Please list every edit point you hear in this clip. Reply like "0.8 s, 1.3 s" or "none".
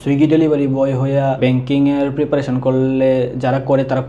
1.4 s